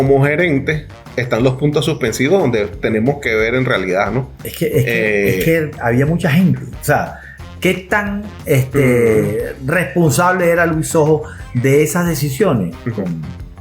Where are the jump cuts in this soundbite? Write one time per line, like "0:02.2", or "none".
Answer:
0:07.3